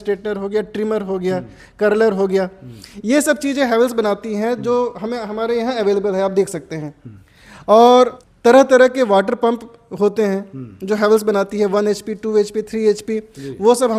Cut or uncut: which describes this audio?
cut